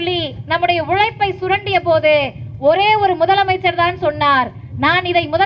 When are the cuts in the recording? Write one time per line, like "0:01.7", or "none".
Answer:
none